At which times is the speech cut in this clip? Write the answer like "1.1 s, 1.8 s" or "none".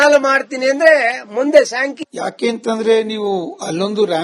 1.8 s

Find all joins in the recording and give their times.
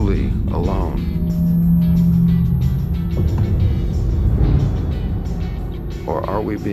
none

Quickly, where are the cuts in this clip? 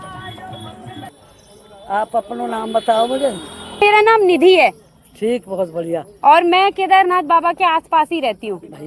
1.1 s, 3.8 s

